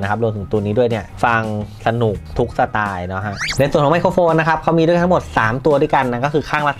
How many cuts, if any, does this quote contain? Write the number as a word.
three